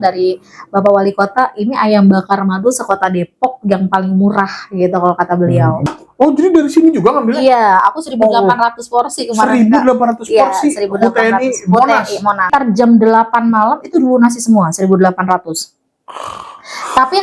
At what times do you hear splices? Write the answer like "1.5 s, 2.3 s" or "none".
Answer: 5.8 s, 12.4 s